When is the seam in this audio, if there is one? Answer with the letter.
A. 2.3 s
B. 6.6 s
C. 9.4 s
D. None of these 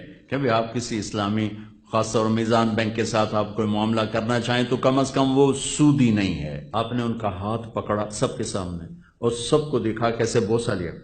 B